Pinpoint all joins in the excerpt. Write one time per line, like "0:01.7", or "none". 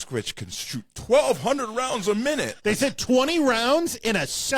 0:02.5